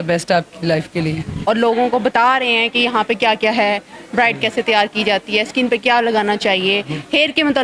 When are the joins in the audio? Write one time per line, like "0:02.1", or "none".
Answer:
0:01.3